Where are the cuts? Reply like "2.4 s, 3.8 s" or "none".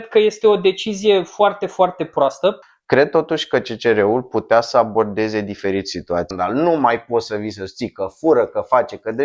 2.7 s, 6.3 s

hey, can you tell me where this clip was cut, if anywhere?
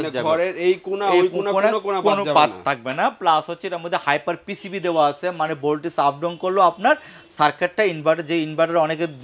none

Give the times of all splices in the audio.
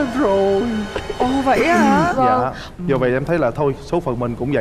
2.6 s

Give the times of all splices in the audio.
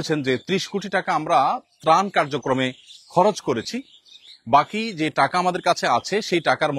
none

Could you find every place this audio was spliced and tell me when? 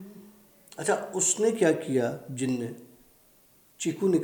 none

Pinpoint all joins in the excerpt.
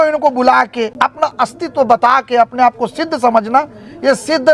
0.9 s

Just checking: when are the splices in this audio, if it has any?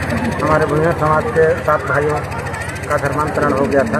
none

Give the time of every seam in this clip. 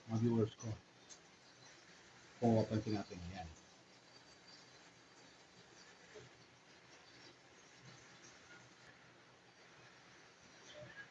8.9 s

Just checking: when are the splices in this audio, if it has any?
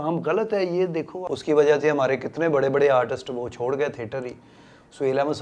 1.2 s

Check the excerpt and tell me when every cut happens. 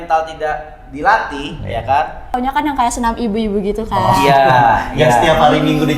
2.4 s

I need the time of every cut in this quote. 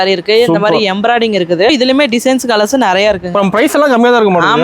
1.7 s

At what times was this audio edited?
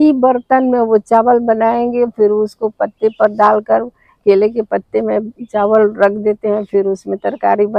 none

